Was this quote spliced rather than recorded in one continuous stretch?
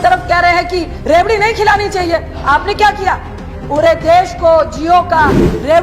yes; 1 cut; at 0.9 s

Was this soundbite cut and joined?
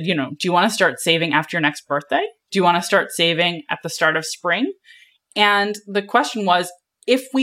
no; 0 cuts

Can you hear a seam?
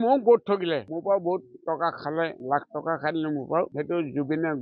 yes; 3 cuts; at 0.9 s, 2.4 s, 3.7 s

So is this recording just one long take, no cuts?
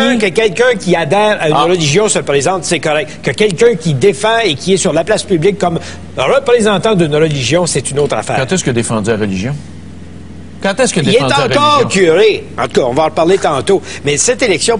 yes; 0 cuts

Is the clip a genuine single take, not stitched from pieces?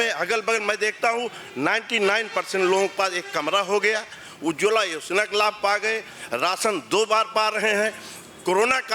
yes; 0 cuts

